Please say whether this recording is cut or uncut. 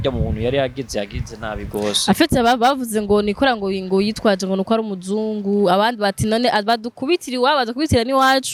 uncut